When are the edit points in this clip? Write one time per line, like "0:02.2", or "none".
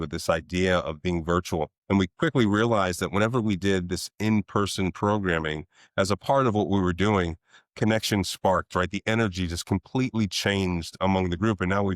0:01.8